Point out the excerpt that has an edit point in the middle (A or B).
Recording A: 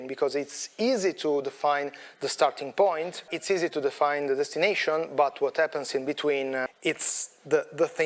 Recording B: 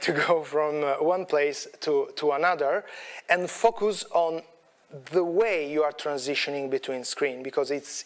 A